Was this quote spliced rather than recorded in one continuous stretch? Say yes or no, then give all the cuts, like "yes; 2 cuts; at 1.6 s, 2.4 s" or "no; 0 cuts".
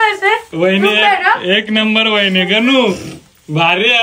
no; 0 cuts